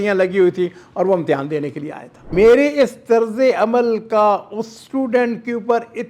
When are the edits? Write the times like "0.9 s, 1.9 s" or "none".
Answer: 2.3 s

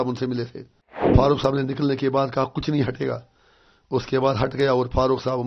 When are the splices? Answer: 1.1 s

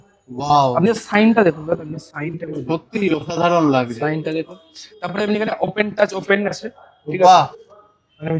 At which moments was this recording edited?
none

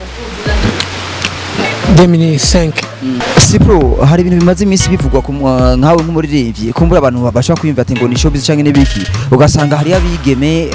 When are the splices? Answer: 3.2 s

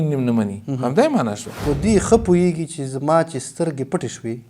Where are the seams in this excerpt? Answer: 1.7 s

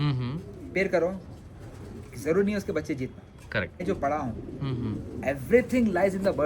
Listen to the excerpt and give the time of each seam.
3.8 s

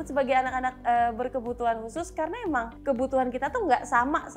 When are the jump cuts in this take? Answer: 2.7 s

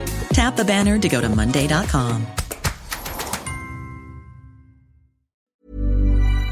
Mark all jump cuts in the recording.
5.4 s

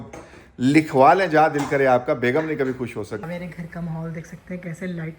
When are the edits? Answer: 3.2 s

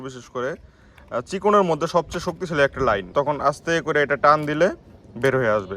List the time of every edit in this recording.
3.1 s

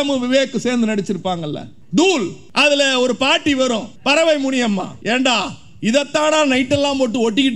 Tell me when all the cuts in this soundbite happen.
1.7 s, 2.4 s, 3.9 s, 4.9 s

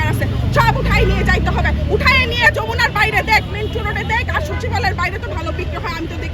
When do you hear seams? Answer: none

